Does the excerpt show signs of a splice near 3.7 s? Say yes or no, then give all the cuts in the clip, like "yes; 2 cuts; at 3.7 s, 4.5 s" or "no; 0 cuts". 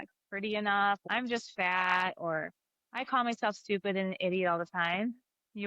no; 1 cut; at 1.1 s